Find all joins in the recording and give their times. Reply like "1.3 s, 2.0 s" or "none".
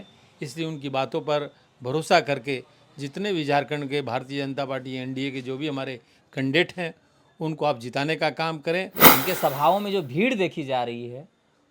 9.0 s